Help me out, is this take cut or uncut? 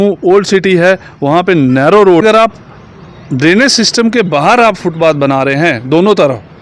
cut